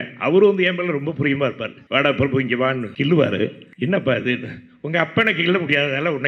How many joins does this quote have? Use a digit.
3